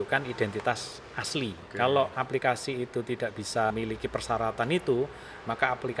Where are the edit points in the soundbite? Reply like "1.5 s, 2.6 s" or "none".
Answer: 1.6 s, 3.7 s